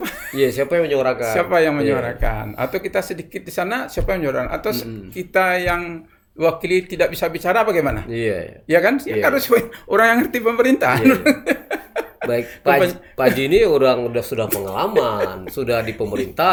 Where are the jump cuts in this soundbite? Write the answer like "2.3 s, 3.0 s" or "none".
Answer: none